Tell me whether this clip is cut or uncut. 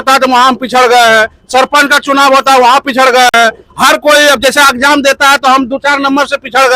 uncut